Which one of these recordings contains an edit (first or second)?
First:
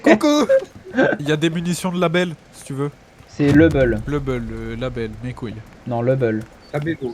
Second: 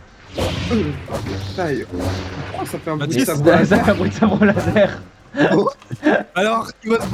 first